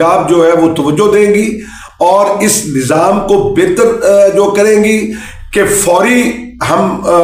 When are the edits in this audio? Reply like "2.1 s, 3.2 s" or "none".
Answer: none

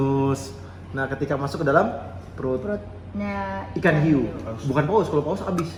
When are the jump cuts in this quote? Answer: none

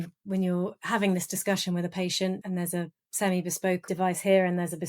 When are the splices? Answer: 3.8 s

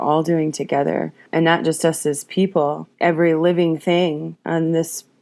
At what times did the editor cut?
1.2 s, 2.9 s, 4.3 s

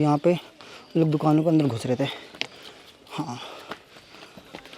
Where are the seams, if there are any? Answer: none

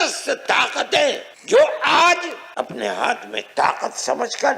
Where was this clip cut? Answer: 1.3 s, 2.4 s

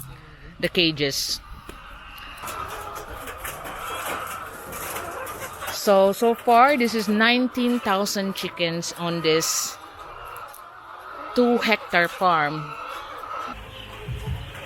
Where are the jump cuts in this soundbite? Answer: 2.4 s, 13.6 s

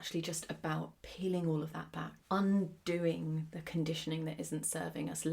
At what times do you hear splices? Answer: 1.0 s, 2.1 s

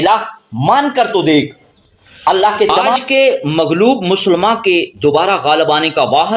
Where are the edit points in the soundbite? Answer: 3.0 s

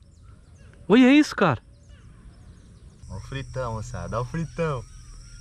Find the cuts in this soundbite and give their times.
3.0 s

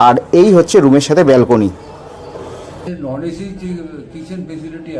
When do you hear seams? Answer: 2.8 s

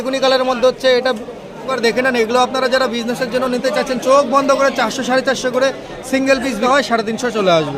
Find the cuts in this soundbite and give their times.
1.7 s, 6.6 s

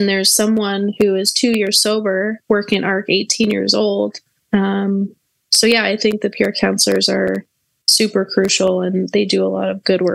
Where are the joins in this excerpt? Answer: 4.3 s

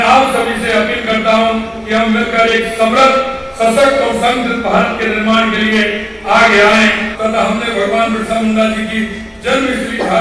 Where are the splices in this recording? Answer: 7.1 s

